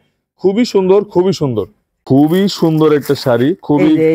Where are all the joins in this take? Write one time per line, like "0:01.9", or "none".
0:02.0